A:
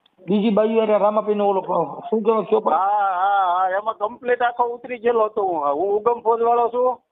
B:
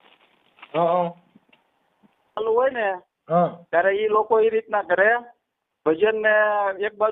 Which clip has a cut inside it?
B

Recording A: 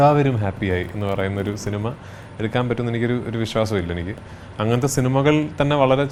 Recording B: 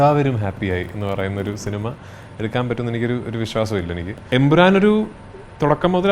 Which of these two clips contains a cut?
B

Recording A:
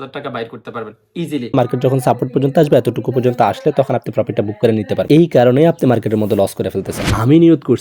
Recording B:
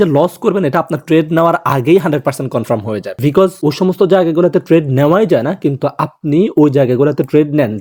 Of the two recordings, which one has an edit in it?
A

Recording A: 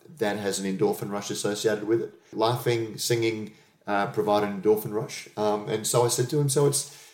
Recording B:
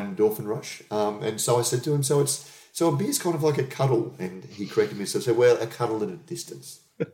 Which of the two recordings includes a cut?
A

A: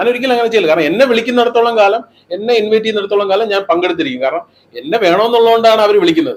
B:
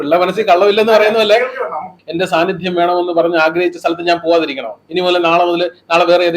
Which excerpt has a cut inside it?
B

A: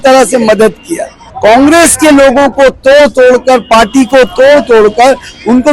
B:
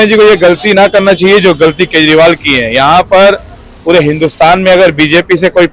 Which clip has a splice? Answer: A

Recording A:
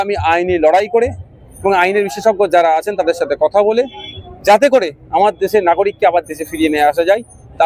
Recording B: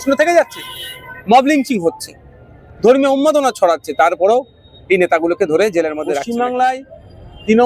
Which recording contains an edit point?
B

